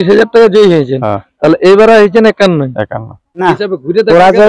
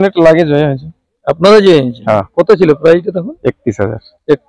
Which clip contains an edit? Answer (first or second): first